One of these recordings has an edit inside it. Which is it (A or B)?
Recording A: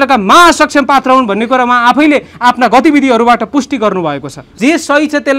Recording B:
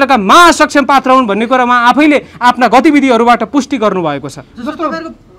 A